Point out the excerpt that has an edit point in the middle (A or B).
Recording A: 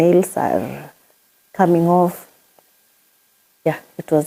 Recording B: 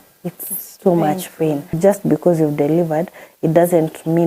B